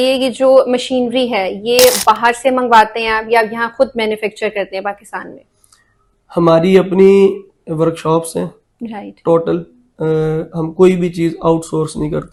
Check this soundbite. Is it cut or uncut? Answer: uncut